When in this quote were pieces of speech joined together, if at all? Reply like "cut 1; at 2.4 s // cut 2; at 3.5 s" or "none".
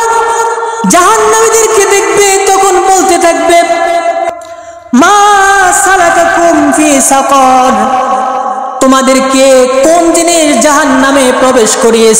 cut 1; at 4.3 s